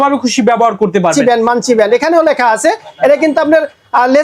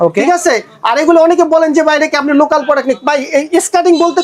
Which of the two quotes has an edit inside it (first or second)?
first